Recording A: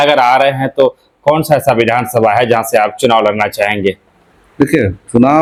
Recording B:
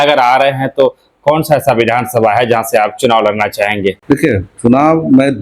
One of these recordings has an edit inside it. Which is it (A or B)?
B